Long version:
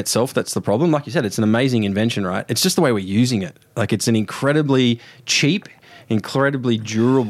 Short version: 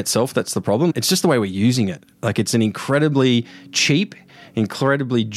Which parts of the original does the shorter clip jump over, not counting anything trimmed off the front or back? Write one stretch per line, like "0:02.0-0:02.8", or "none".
0:00.9-0:02.4